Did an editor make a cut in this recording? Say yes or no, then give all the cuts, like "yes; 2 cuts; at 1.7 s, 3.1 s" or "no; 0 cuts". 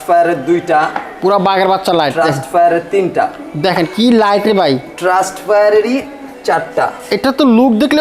no; 0 cuts